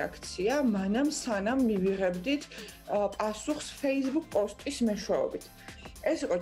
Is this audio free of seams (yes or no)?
yes